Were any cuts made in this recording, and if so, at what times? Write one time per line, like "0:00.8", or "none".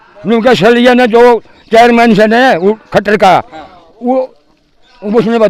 none